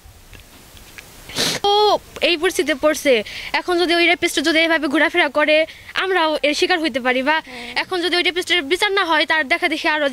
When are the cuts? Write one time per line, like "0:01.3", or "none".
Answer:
0:01.6